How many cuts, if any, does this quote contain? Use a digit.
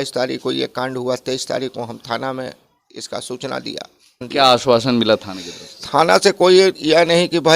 1